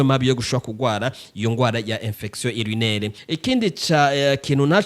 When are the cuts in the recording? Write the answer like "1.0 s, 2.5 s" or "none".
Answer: 3.2 s